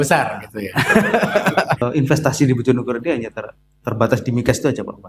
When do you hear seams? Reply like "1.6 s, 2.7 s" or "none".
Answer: 1.8 s

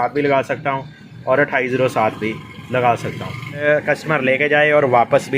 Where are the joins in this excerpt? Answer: 3.6 s

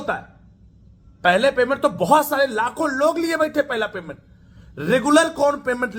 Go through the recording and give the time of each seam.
none

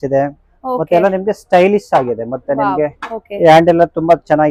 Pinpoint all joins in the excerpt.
none

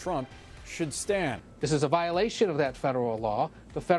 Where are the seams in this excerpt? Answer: 1.4 s

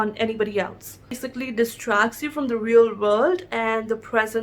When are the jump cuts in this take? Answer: 1.1 s

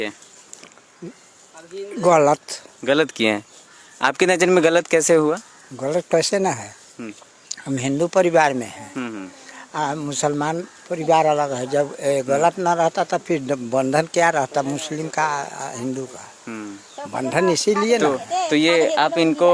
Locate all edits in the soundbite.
none

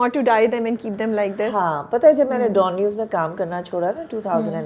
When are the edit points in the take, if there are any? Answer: none

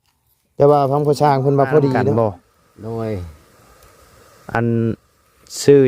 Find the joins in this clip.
2.1 s

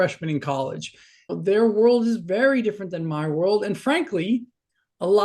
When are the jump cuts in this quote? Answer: 1.3 s

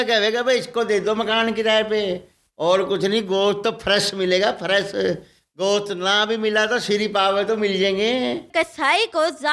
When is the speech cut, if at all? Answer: 8.5 s

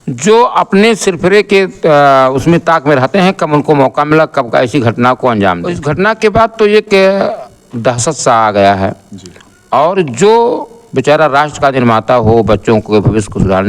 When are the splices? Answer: 5.8 s

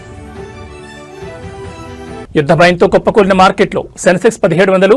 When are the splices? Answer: 0.8 s, 1.7 s

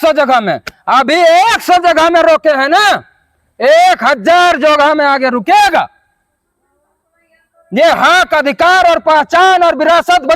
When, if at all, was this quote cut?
none

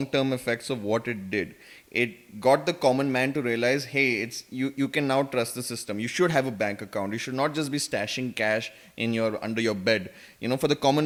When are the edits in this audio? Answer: none

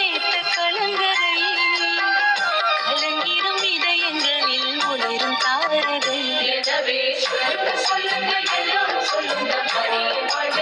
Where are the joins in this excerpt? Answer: none

